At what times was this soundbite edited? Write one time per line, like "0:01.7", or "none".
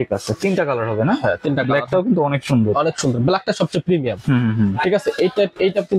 none